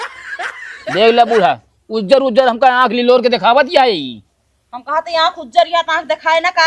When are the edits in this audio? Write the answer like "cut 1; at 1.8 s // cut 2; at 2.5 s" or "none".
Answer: cut 1; at 0.9 s